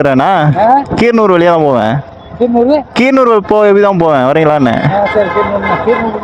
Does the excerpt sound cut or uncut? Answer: uncut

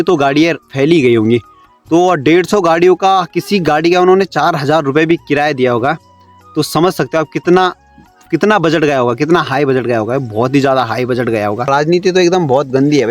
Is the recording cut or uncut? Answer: cut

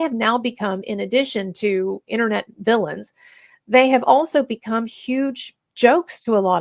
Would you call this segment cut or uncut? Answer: uncut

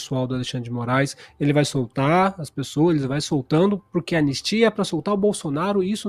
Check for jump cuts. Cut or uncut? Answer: uncut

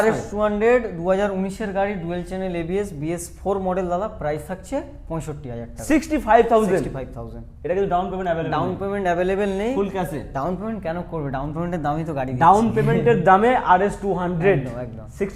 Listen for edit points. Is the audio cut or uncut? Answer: uncut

